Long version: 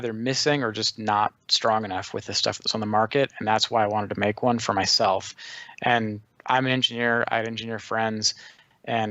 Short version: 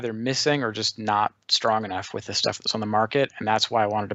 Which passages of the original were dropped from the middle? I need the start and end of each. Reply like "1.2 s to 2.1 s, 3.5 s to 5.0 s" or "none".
none